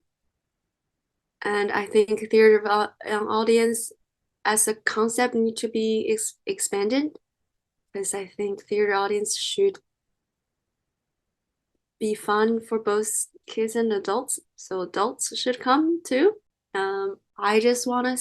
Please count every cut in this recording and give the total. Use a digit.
1